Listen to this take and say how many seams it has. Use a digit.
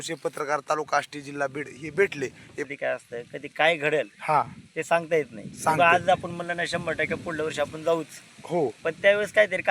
1